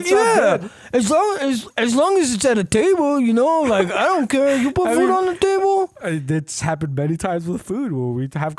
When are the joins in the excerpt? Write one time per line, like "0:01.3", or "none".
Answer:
none